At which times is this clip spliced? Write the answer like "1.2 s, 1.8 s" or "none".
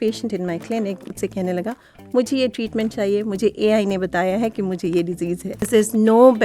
1.1 s, 5.7 s